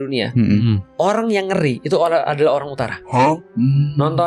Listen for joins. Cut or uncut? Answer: uncut